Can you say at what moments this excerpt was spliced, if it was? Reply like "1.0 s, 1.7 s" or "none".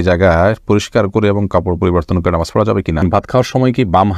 3.0 s